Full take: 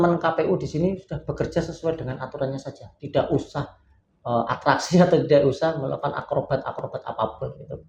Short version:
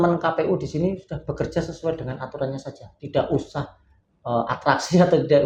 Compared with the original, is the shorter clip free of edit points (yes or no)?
yes